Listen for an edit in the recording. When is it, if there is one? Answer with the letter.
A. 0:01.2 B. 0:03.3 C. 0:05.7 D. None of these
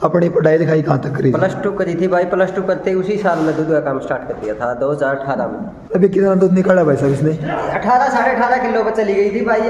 C